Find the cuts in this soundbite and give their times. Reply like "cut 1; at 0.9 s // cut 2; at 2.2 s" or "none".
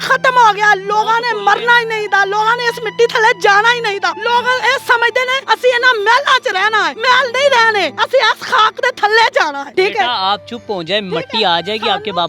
cut 1; at 4.2 s // cut 2; at 5.4 s // cut 3; at 6.9 s // cut 4; at 8.0 s // cut 5; at 9.6 s